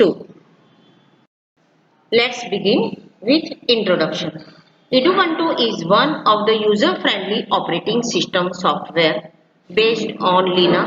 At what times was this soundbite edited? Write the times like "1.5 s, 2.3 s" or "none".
1.6 s